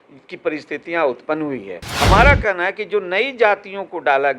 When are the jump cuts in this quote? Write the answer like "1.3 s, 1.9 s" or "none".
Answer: 1.8 s